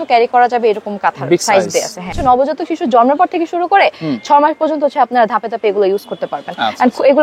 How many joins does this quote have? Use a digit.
1